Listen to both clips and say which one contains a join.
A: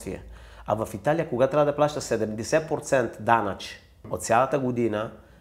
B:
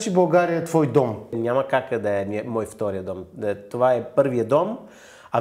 B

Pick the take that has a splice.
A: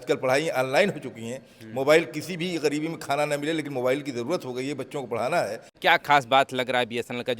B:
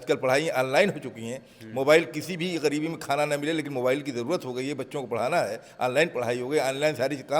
A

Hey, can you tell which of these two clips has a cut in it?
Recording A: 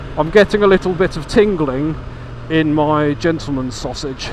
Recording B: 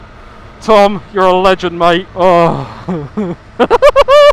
B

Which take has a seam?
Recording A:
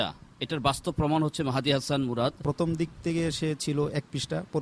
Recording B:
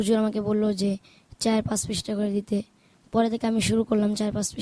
A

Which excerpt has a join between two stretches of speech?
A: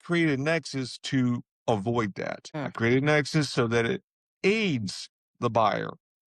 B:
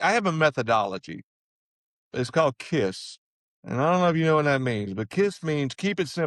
A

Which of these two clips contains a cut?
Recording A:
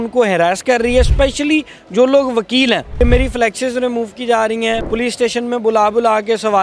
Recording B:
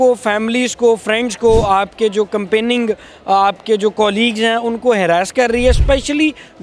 A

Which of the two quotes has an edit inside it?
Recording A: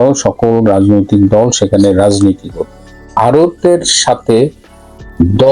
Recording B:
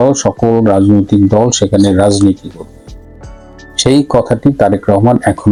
A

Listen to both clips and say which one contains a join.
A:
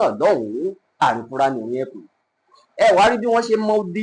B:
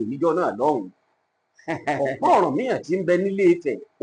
B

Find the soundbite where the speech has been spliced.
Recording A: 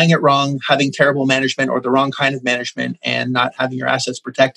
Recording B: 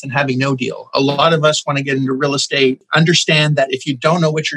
B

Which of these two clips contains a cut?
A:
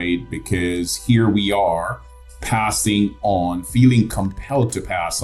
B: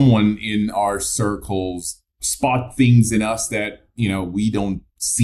B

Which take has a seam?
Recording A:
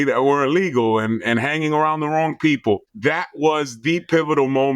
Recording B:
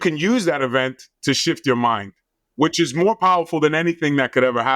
A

